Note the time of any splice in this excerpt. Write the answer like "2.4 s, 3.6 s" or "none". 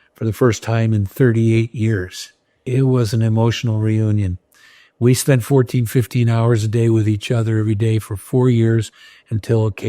2.7 s